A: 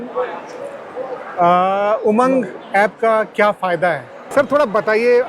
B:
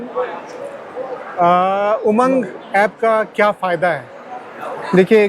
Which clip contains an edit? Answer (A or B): A